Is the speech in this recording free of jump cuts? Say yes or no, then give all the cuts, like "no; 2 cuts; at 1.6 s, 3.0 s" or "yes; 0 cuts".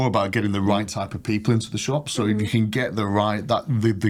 yes; 0 cuts